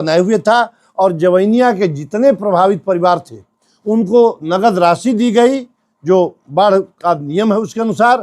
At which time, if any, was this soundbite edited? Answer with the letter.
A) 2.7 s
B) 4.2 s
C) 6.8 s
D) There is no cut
D